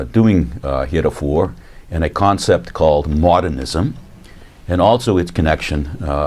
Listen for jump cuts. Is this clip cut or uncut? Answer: cut